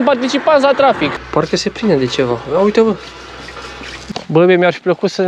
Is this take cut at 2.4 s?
no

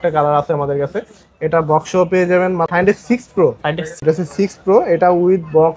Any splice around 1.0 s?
no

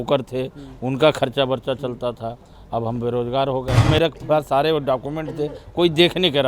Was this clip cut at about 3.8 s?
yes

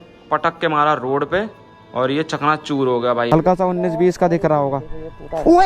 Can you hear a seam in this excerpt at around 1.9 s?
no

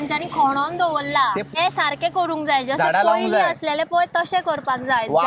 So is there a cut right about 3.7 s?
no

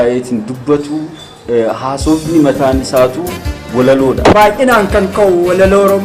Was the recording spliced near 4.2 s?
yes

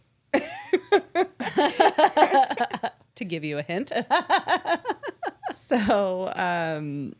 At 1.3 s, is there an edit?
no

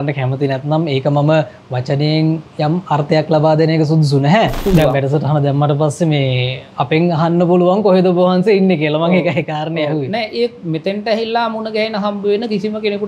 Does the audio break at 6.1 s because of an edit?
no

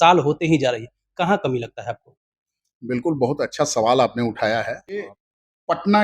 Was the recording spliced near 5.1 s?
yes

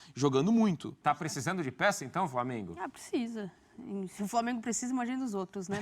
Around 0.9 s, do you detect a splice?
yes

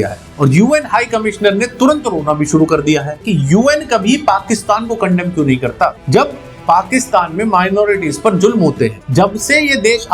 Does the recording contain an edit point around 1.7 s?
no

